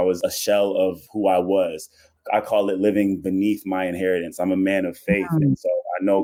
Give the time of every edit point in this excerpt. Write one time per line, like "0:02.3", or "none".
none